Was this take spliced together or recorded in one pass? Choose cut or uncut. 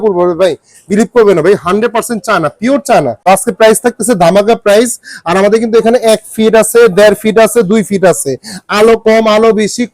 cut